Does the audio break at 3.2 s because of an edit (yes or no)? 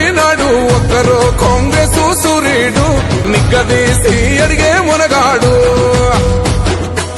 yes